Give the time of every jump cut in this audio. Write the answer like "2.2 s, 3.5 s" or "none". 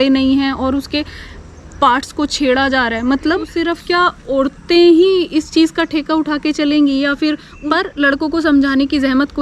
3.6 s, 7.5 s

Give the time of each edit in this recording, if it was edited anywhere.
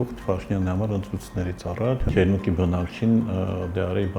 2.0 s

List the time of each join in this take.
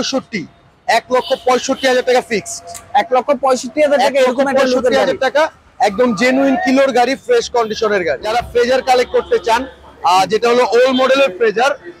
8.2 s

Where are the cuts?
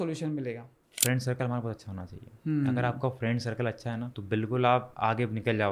0.9 s, 4.1 s, 4.9 s

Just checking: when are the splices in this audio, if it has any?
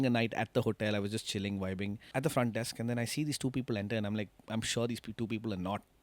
2.0 s

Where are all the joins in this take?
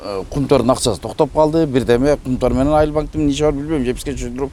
none

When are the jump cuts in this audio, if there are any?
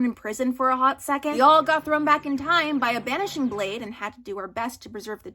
1.3 s

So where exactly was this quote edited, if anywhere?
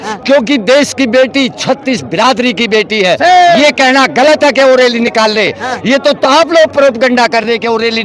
none

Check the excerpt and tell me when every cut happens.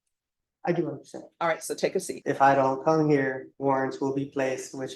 2.1 s, 3.5 s

